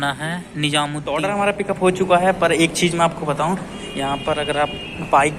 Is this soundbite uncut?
no; 1 cut; at 1.2 s

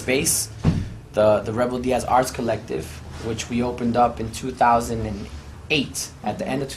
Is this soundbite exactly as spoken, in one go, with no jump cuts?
no; 1 cut; at 4.1 s

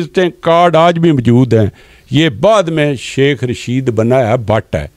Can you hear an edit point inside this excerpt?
no; 0 cuts

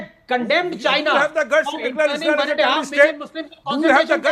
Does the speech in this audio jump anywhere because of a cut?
no; 0 cuts

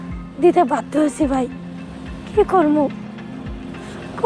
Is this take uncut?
yes; 0 cuts

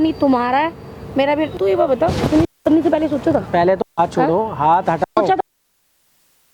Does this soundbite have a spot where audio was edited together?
yes; 1 cut; at 1.5 s

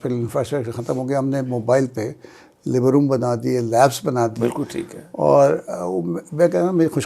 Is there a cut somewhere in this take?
no; 0 cuts

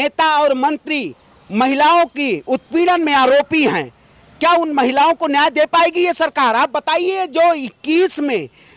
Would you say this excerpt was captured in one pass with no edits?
yes; 0 cuts

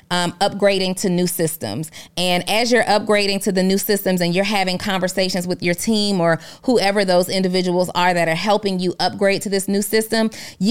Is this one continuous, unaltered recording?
yes; 0 cuts

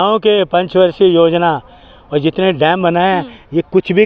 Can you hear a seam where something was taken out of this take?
no; 0 cuts

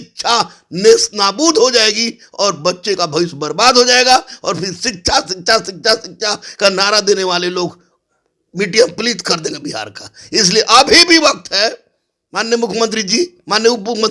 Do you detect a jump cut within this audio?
no; 0 cuts

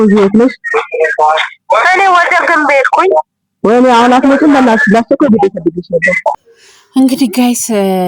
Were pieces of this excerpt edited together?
yes; 1 cut; at 6.4 s

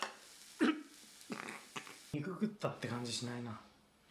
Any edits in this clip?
yes; 1 cut; at 2.1 s

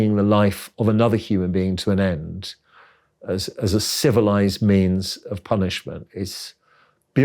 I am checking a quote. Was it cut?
no; 0 cuts

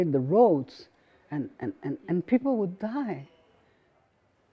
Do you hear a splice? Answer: no; 0 cuts

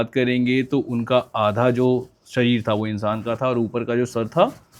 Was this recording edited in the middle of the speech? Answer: no; 0 cuts

